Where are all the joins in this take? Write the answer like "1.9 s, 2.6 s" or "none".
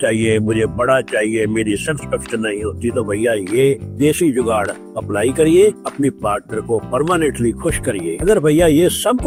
none